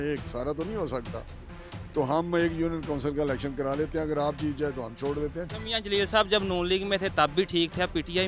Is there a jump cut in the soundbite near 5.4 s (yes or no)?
yes